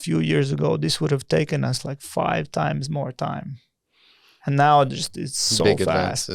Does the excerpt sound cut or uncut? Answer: uncut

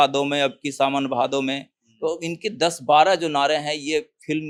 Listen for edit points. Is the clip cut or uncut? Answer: uncut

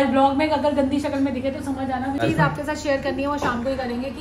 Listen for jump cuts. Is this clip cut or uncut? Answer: cut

